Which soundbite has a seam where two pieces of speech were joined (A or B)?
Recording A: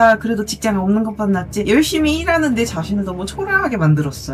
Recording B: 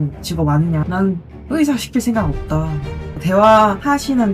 B